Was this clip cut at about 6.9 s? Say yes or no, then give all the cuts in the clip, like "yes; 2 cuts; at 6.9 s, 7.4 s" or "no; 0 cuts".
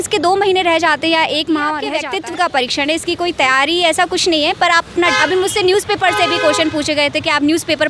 no; 2 cuts; at 1.9 s, 5.1 s